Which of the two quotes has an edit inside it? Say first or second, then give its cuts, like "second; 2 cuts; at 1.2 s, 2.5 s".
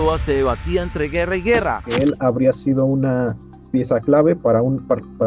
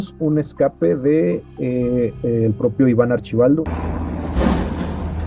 first; 1 cut; at 1.9 s